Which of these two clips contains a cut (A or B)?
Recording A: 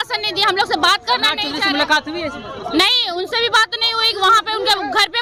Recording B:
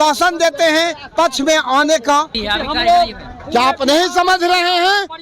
B